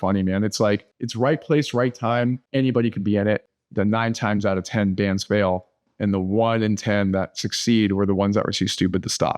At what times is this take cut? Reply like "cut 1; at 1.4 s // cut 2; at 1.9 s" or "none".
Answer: cut 1; at 1.0 s // cut 2; at 2.4 s // cut 3; at 3.5 s